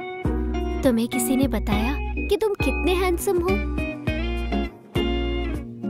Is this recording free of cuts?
yes; 0 cuts

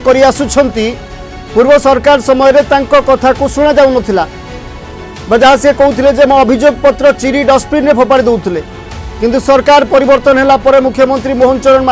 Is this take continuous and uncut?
yes; 0 cuts

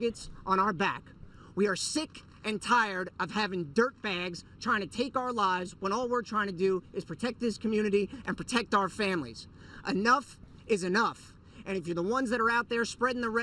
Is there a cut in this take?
yes; 2 cuts; at 9.2 s, 11.2 s

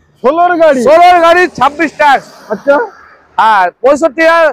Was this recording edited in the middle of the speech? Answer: no; 0 cuts

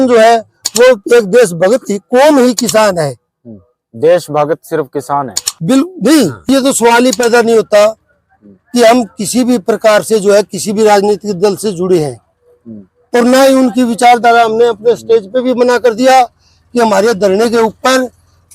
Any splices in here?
yes; 1 cut; at 6.5 s

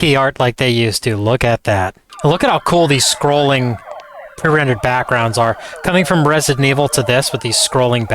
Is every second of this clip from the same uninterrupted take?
no; 1 cut; at 2.0 s

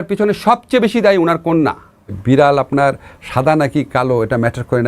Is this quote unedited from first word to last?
no; 1 cut; at 2.2 s

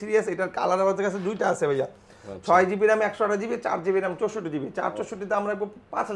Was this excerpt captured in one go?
yes; 0 cuts

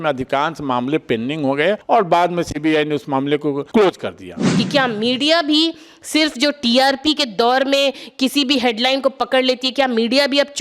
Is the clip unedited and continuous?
no; 3 cuts; at 1.8 s, 3.6 s, 4.4 s

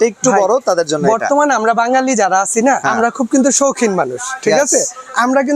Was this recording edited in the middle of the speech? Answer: yes; 1 cut; at 2.9 s

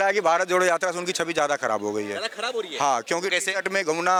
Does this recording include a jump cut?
no; 0 cuts

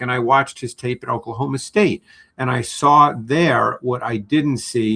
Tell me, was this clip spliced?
no; 0 cuts

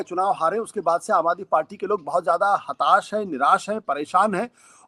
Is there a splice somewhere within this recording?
no; 0 cuts

